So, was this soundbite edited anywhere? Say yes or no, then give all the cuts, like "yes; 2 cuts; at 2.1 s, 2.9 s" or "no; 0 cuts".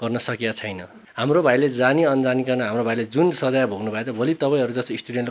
yes; 1 cut; at 1.0 s